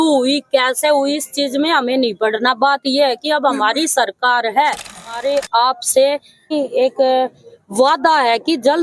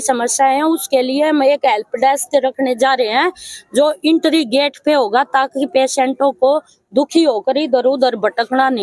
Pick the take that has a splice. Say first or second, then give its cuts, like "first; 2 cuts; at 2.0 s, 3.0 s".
first; 2 cuts; at 5.2 s, 6.5 s